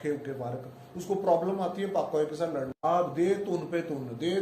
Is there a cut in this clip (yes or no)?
yes